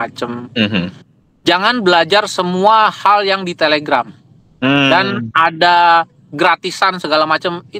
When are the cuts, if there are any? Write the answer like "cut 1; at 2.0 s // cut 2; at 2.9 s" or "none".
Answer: none